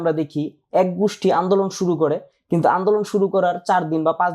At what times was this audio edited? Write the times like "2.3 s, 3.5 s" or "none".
none